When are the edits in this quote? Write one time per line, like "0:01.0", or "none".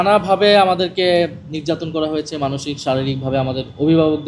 none